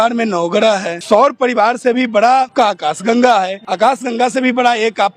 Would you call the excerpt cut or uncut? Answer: cut